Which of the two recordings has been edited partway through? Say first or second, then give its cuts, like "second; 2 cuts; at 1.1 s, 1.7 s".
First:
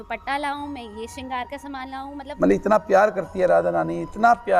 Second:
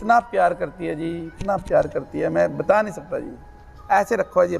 first; 1 cut; at 2.3 s